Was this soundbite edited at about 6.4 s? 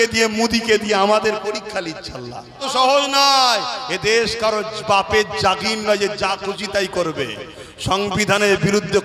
no; 1 cut; at 2.6 s

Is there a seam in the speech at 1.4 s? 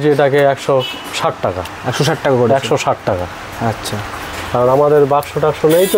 no; 0 cuts

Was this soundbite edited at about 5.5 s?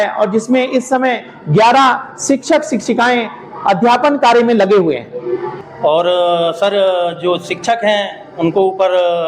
yes; 1 cut; at 5.5 s

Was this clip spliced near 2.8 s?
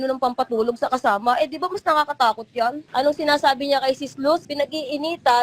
yes; 2 cuts; at 2.8 s, 4.5 s

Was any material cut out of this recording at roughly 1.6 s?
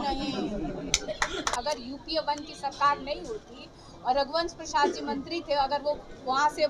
yes; 1 cut; at 1.6 s

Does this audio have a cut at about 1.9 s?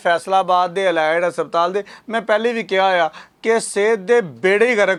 no; 0 cuts

